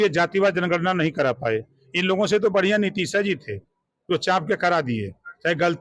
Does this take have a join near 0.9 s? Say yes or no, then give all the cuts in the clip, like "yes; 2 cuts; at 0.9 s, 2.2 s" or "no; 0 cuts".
no; 0 cuts